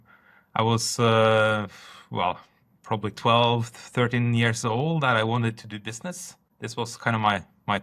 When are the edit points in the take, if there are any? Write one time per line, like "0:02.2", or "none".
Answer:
none